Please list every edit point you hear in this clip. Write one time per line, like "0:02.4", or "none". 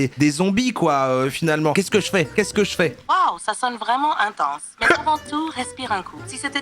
0:01.7